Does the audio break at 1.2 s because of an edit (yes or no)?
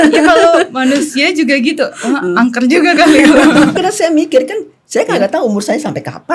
no